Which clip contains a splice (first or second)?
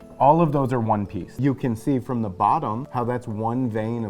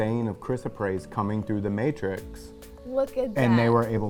first